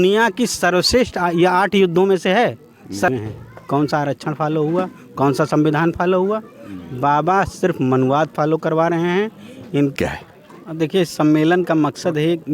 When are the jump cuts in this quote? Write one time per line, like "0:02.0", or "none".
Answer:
0:03.1
0:09.9